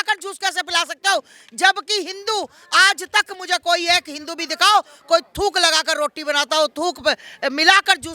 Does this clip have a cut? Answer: no; 0 cuts

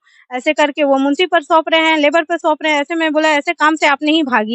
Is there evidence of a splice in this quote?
no; 0 cuts

